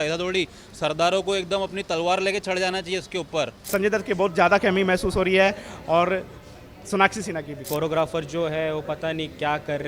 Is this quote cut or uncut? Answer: cut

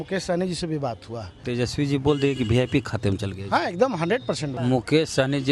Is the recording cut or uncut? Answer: cut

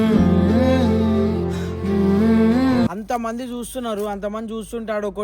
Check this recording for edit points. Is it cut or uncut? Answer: cut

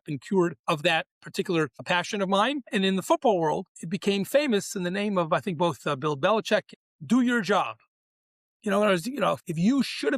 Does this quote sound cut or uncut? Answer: cut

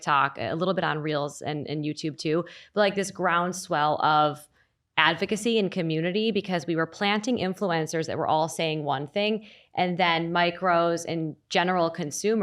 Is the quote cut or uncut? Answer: uncut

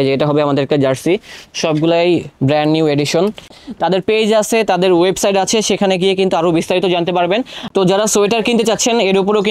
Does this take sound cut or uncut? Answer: cut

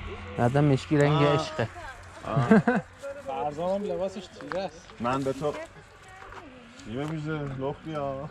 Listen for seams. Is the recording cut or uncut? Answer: uncut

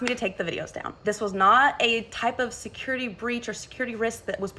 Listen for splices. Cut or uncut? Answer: cut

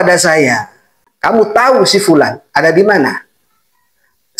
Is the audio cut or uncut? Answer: cut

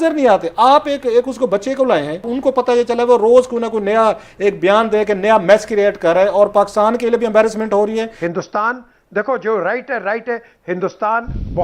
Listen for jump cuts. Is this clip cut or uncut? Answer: cut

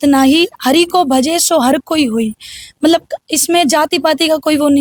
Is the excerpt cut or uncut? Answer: uncut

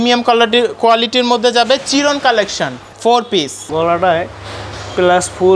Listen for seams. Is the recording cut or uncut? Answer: uncut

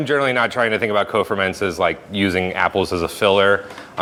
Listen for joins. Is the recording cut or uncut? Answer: uncut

